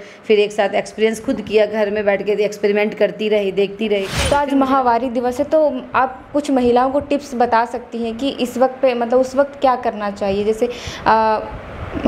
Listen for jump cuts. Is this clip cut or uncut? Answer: cut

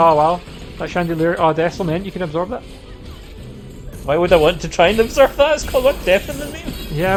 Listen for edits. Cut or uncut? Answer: uncut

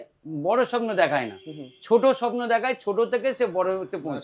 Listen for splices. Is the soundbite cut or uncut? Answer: uncut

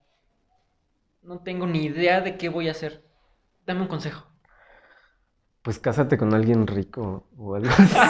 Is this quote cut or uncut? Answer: uncut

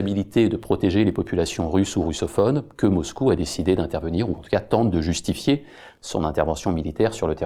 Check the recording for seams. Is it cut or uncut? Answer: uncut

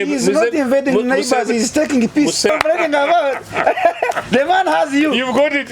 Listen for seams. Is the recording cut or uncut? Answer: cut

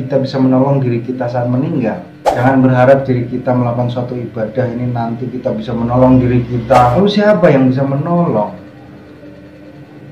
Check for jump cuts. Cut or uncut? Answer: cut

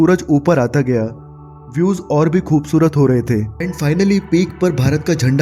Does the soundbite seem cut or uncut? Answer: cut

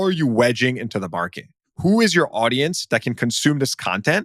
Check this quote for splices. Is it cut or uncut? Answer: cut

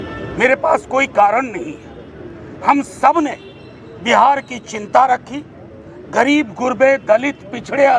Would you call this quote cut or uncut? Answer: uncut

